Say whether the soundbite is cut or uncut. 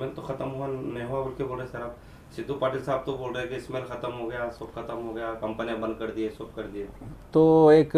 uncut